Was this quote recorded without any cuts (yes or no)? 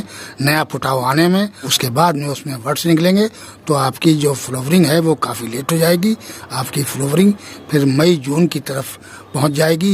no